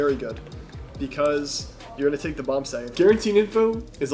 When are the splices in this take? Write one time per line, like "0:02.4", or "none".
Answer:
0:02.9

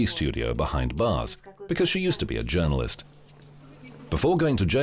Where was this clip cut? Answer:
0:02.2

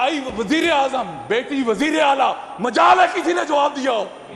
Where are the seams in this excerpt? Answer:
none

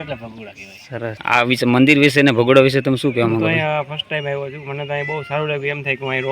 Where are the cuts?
0:01.2

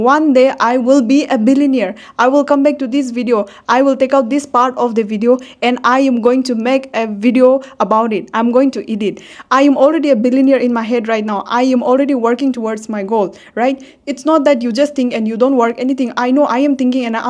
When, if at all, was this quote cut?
none

